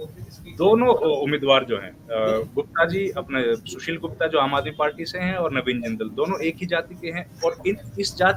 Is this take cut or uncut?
uncut